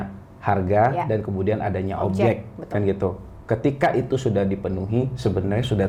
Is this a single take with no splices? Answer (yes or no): yes